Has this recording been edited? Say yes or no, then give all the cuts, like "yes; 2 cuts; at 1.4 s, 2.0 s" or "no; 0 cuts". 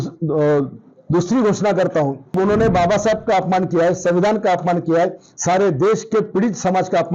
yes; 1 cut; at 2.3 s